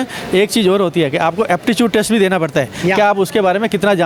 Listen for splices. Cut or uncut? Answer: uncut